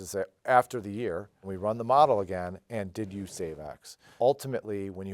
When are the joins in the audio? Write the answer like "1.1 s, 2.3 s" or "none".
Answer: 1.5 s, 4.0 s